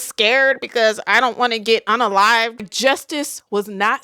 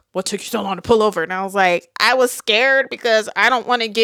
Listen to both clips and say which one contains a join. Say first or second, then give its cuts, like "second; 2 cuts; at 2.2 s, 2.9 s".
first; 1 cut; at 2.7 s